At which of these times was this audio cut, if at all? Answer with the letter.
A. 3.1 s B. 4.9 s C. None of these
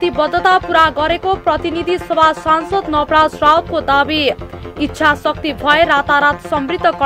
C